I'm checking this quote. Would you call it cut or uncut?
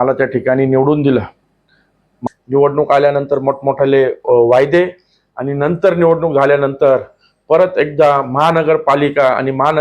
cut